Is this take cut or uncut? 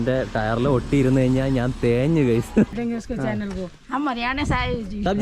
cut